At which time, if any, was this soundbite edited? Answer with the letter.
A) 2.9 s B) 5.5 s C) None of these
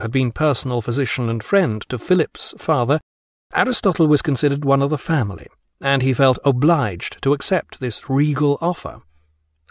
C